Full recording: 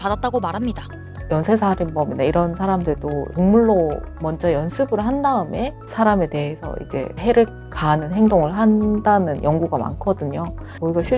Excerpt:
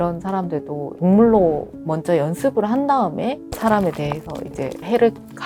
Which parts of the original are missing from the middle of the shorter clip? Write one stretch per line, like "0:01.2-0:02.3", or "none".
none